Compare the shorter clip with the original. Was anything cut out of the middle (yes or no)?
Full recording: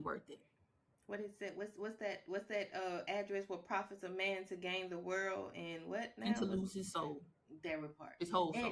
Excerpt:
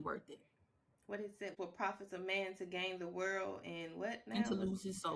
yes